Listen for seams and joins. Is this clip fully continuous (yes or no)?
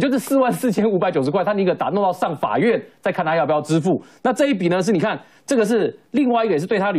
yes